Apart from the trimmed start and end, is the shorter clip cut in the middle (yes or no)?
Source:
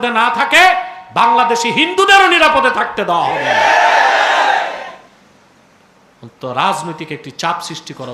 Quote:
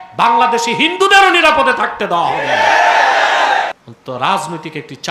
yes